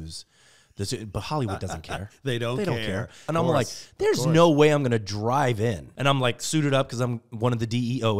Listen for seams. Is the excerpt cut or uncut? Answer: cut